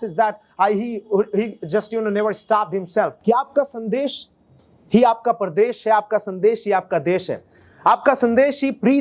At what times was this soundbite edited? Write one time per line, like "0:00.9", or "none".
0:03.2